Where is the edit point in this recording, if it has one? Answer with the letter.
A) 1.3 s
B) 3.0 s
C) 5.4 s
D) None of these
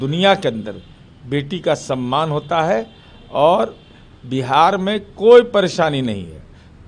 D